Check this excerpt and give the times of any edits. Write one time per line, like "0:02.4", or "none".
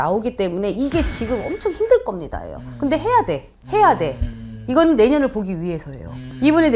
none

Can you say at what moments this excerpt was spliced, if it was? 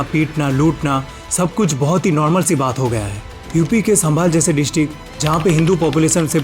0:03.2

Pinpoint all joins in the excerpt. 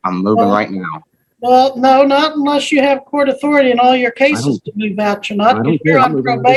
none

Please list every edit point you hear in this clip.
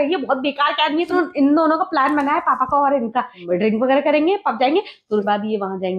0:01.2
0:03.4
0:05.2

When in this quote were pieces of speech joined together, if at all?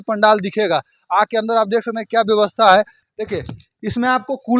0:03.0

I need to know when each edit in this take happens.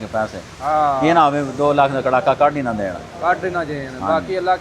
none

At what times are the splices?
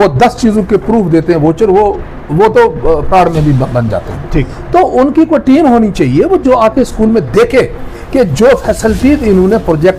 none

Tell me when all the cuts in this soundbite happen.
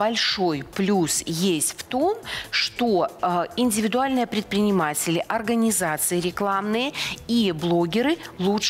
none

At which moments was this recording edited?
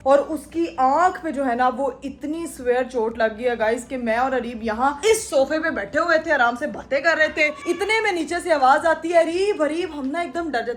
none

